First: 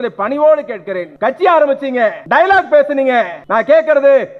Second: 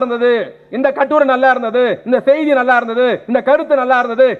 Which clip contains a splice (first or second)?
first